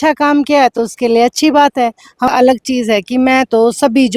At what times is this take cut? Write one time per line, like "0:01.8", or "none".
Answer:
0:02.3